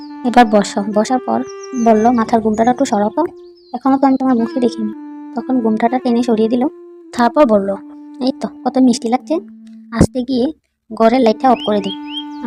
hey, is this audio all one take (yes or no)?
yes